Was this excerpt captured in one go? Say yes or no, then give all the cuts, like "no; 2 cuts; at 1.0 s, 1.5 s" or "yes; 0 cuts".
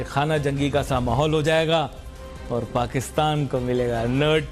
yes; 0 cuts